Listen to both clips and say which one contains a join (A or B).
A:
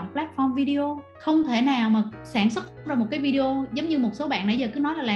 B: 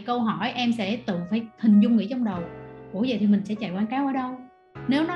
A